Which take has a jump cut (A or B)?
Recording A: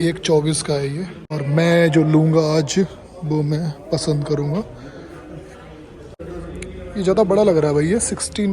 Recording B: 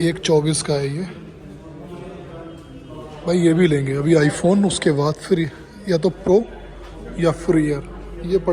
A